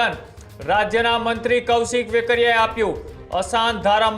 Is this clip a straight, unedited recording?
yes; 0 cuts

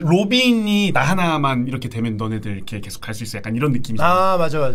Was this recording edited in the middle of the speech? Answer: yes; 1 cut; at 0.9 s

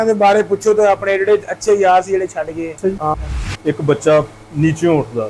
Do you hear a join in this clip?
yes; 1 cut; at 3.1 s

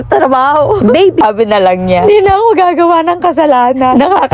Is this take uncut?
no; 1 cut; at 1.2 s

